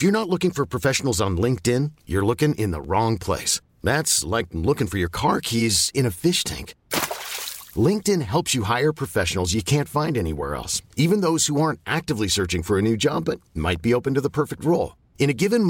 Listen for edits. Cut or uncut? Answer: uncut